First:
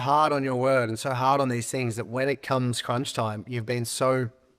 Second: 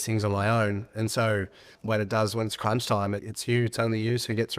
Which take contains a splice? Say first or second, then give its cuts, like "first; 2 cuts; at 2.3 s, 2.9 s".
second; 2 cuts; at 1.7 s, 3.3 s